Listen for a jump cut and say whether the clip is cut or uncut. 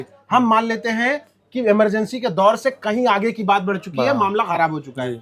uncut